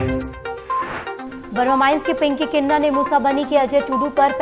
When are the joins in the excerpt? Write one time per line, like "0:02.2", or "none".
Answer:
0:01.3